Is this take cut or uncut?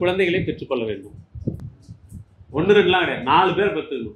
cut